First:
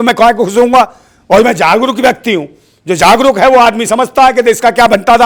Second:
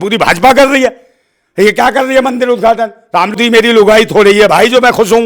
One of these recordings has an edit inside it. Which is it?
second; 1 cut; at 3.4 s

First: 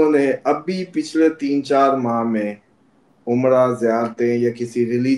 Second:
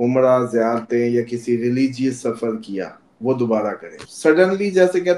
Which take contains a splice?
second; 1 cut; at 4.0 s

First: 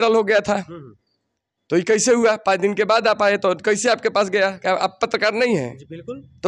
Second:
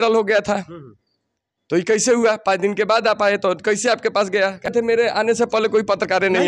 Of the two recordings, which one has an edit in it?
second; 1 cut; at 4.7 s

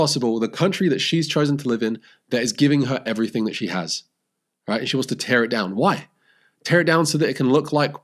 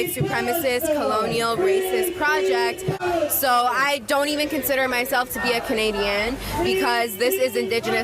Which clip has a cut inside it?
second; 1 cut; at 3.0 s

